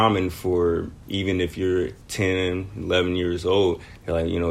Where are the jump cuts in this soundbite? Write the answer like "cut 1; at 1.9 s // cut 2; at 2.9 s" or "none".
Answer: cut 1; at 1.0 s // cut 2; at 2.0 s